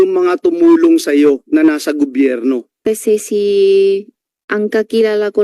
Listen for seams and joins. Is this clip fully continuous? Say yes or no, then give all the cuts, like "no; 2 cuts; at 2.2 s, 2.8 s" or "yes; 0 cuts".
no; 1 cut; at 2.8 s